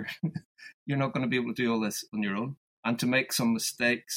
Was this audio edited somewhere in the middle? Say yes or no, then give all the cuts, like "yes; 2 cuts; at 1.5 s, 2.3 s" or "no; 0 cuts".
yes; 1 cut; at 2.6 s